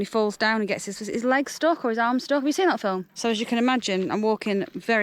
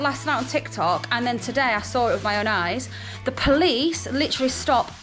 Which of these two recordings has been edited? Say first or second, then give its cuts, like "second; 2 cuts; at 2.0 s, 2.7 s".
first; 1 cut; at 3.1 s